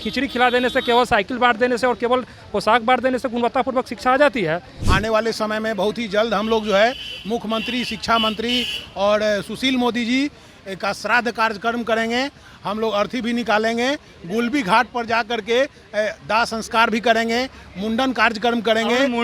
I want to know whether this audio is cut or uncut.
cut